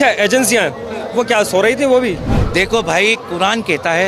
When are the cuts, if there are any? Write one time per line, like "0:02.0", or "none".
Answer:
0:02.4